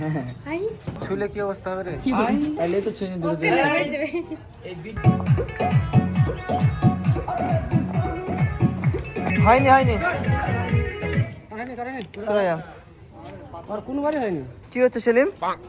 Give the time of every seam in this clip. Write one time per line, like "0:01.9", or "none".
0:01.0
0:05.0
0:09.3
0:14.6